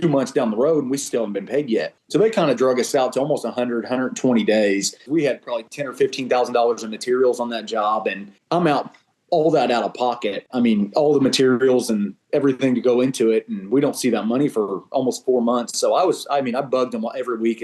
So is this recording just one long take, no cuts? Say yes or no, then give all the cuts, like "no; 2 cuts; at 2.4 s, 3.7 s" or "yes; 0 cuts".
no; 3 cuts; at 2.0 s, 5.0 s, 8.3 s